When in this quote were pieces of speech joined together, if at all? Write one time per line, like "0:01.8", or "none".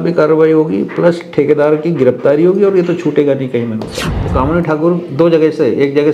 0:04.2